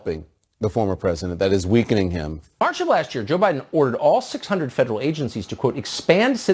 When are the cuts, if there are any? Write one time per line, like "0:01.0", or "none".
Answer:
0:02.6